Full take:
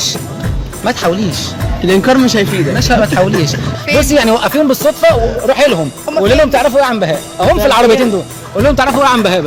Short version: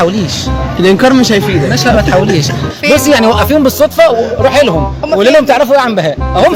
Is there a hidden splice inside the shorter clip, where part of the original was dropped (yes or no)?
no